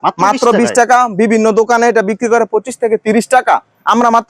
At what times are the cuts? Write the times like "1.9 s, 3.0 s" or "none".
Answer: none

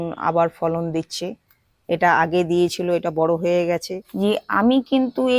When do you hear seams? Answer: 4.0 s

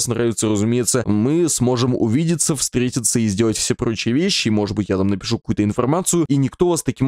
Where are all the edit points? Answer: 1.1 s, 6.3 s

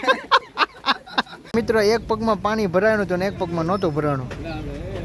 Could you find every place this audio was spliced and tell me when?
1.5 s

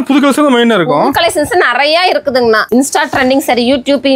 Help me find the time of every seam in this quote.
2.6 s

